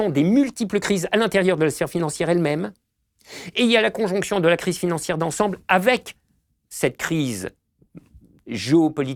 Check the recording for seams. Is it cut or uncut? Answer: uncut